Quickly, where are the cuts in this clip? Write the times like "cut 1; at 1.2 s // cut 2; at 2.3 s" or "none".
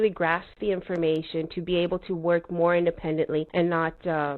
cut 1; at 3.5 s